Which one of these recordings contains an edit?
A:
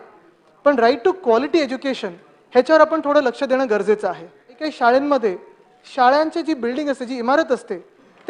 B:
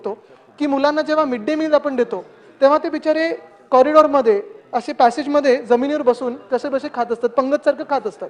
A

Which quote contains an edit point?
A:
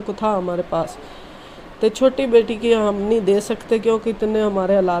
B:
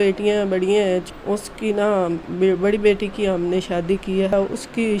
B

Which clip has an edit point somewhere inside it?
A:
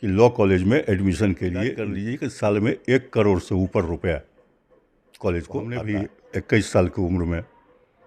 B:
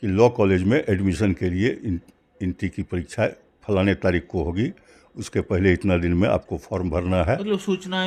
A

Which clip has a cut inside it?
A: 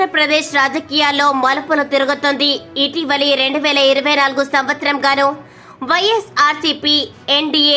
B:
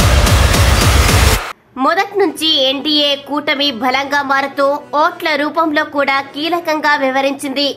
B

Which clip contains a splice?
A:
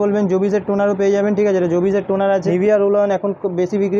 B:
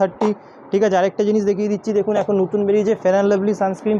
A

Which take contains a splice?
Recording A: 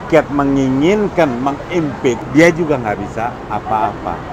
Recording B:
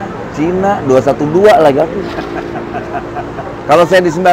A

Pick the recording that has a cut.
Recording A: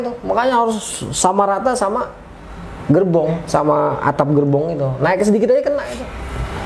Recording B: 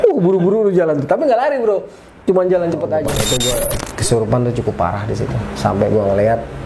B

